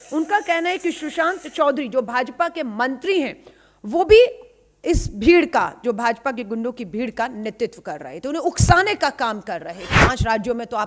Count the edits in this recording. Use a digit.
1